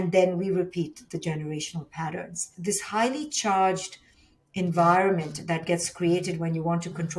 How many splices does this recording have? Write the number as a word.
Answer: one